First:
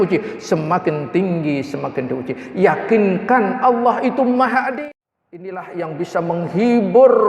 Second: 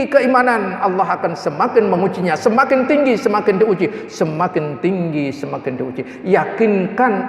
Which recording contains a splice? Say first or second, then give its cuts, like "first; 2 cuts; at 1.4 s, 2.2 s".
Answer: first; 1 cut; at 4.7 s